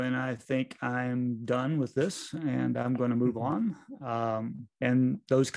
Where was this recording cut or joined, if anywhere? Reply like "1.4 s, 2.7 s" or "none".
4.6 s